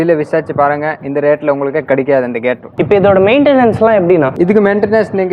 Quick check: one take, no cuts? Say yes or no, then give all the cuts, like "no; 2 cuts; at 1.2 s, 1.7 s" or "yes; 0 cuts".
yes; 0 cuts